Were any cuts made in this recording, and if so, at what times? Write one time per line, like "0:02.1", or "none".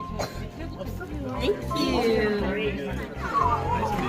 0:01.1